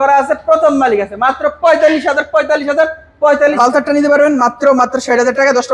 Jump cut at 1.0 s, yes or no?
no